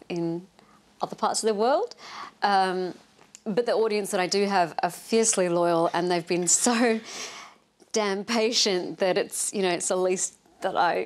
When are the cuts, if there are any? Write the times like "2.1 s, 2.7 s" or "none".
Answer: 9.9 s